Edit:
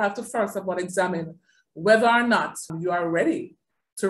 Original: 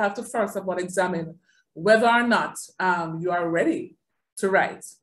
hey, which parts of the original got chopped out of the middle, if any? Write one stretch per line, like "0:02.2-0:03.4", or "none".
0:02.7-0:03.1